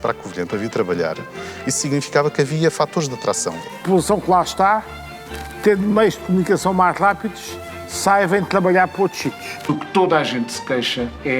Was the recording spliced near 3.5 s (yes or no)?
yes